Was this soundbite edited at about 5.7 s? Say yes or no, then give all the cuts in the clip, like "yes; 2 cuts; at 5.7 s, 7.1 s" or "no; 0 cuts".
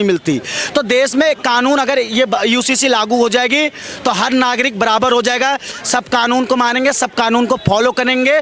yes; 1 cut; at 5.7 s